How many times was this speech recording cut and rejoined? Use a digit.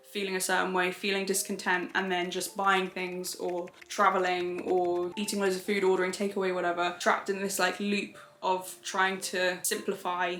0